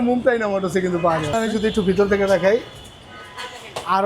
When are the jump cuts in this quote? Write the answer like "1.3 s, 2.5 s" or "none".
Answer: 1.3 s